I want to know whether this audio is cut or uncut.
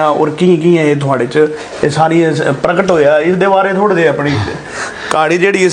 uncut